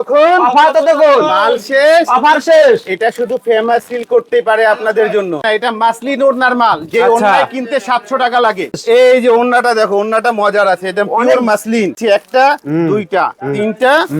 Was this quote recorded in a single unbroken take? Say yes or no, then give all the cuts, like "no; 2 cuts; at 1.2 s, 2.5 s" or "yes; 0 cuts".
no; 3 cuts; at 5.4 s, 8.8 s, 12.0 s